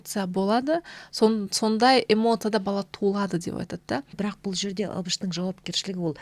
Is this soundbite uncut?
no; 1 cut; at 4.2 s

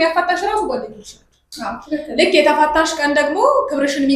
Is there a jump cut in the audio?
no; 0 cuts

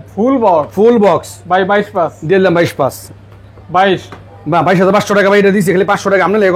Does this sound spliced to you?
no; 0 cuts

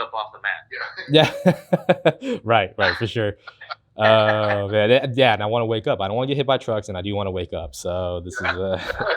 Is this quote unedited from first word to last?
yes; 0 cuts

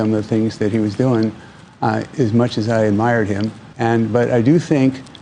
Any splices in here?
no; 0 cuts

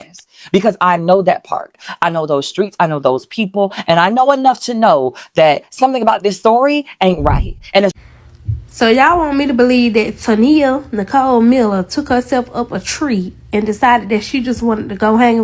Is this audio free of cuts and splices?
no; 1 cut; at 7.9 s

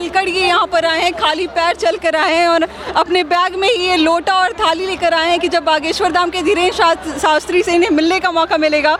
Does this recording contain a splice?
no; 0 cuts

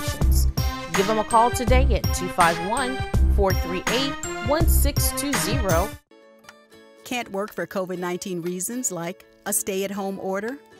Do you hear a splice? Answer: yes; 1 cut; at 6.1 s

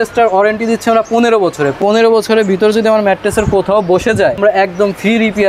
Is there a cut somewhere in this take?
yes; 2 cuts; at 1.8 s, 4.4 s

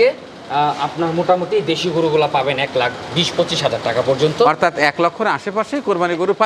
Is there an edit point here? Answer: no; 0 cuts

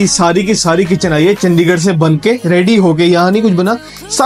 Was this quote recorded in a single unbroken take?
yes; 0 cuts

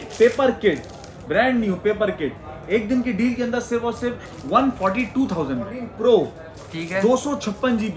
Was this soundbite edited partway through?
yes; 1 cut; at 5.8 s

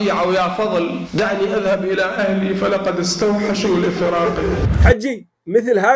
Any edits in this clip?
yes; 1 cut; at 4.7 s

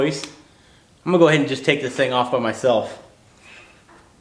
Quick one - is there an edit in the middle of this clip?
no; 0 cuts

